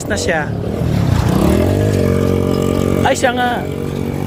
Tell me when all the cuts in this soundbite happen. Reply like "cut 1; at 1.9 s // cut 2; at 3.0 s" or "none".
none

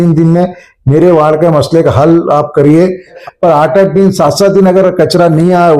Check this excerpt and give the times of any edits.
cut 1; at 3.2 s

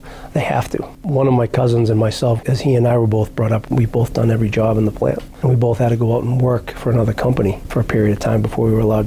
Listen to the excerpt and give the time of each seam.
cut 1; at 0.9 s // cut 2; at 2.4 s // cut 3; at 3.7 s // cut 4; at 5.3 s

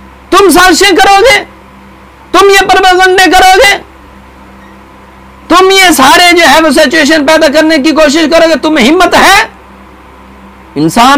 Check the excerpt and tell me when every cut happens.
none

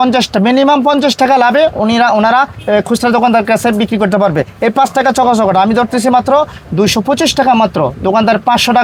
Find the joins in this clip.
none

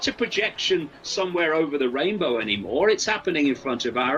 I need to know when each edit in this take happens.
none

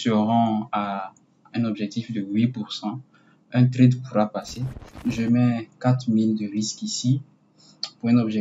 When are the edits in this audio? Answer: cut 1; at 4.9 s

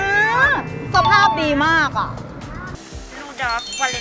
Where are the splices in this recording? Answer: cut 1; at 2.8 s

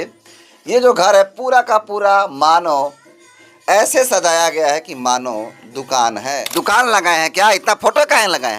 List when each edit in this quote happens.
cut 1; at 6.4 s

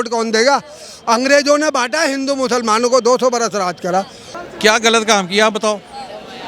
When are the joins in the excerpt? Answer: cut 1; at 4.2 s

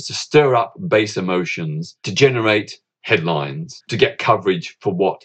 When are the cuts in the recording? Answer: cut 1; at 2.1 s // cut 2; at 2.9 s // cut 3; at 3.8 s

